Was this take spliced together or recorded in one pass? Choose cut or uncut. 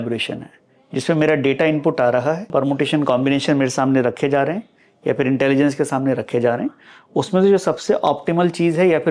cut